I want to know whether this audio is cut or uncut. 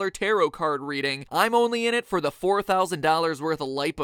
cut